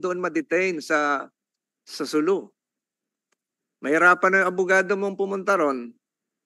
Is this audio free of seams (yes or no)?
yes